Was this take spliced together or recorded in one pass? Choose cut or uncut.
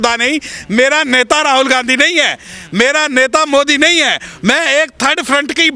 uncut